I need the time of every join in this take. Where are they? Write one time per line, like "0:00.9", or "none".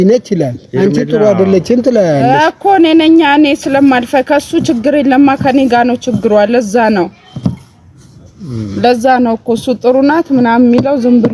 none